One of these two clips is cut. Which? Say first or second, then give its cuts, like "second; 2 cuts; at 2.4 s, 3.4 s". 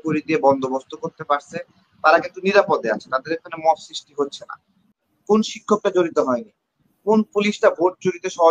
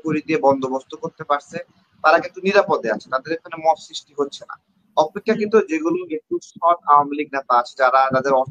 first; 1 cut; at 4.8 s